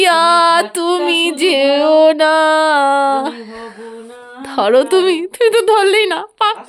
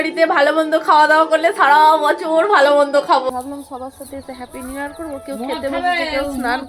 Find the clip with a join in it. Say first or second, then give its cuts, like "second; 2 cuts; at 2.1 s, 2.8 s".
second; 1 cut; at 3.3 s